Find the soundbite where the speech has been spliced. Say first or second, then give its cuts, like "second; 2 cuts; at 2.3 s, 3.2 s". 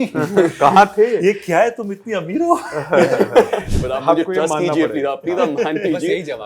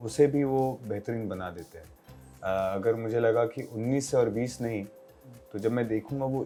first; 1 cut; at 3.7 s